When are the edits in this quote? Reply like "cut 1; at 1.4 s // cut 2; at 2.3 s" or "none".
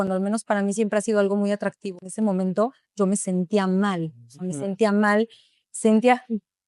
cut 1; at 2.0 s

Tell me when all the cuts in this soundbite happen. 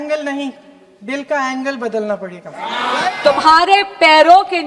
cut 1; at 3.2 s

